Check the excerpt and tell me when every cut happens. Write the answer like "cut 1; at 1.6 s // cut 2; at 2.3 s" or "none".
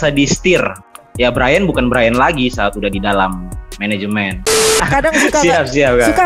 cut 1; at 1.0 s // cut 2; at 4.8 s